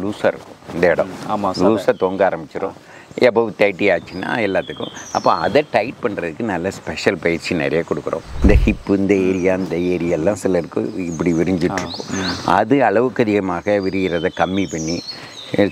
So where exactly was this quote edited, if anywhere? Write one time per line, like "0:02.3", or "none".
0:08.2